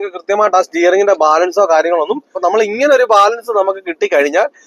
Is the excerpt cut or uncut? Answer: cut